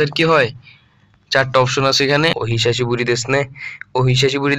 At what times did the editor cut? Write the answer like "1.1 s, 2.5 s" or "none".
2.4 s